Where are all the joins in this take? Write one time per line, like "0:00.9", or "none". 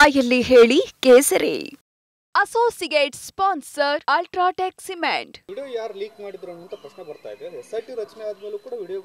0:05.3